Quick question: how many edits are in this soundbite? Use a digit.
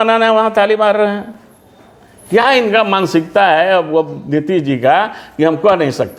0